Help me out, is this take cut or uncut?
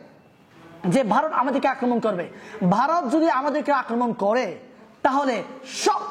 uncut